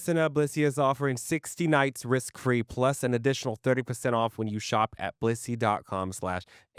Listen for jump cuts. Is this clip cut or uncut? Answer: uncut